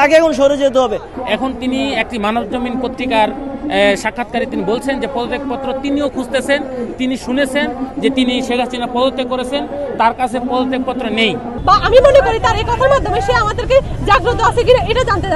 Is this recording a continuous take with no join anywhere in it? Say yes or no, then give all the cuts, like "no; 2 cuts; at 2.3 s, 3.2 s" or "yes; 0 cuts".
no; 2 cuts; at 1.1 s, 11.5 s